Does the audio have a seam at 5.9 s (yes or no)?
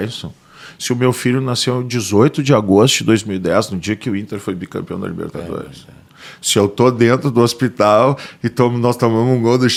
no